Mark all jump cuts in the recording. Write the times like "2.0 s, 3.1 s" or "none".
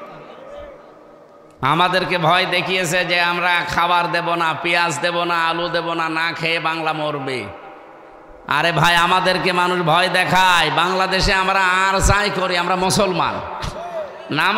none

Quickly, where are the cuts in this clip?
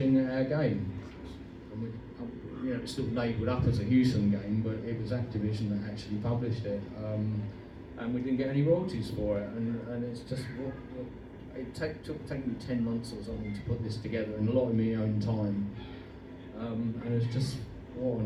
none

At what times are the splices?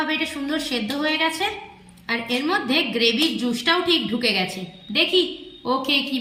none

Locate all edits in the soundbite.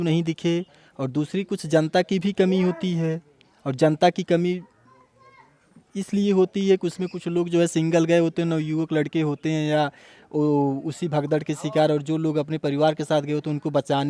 none

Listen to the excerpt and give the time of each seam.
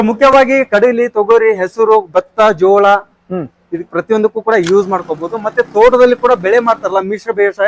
none

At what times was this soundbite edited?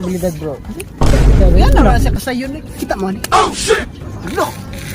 3.8 s

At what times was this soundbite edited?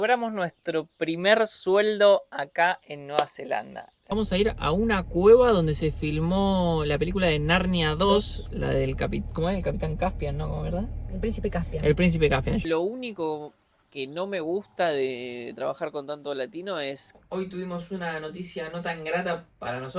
4.1 s, 12.6 s, 17.2 s

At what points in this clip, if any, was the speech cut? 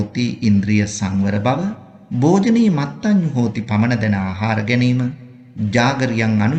none

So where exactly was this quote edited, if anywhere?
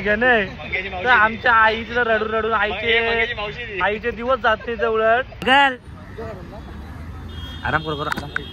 5.3 s

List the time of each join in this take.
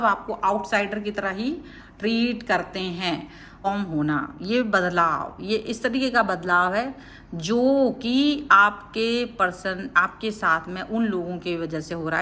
3.7 s

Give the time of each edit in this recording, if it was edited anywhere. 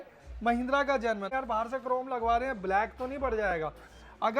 1.3 s

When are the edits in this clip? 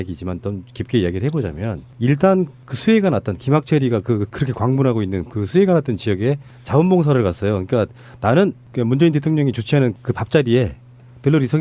none

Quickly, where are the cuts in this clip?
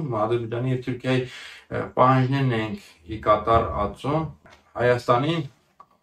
4.5 s

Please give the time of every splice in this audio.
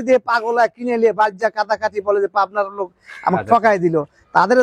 none

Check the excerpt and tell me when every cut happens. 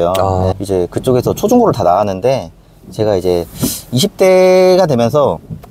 none

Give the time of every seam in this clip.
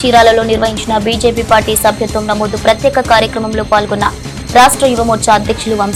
none

